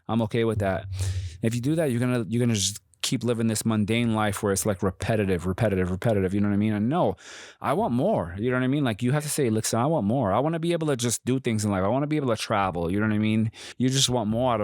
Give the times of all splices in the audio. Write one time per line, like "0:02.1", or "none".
0:13.6